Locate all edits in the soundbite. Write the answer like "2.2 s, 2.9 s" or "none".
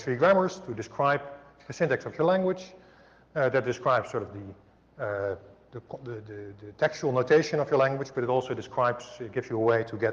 5.5 s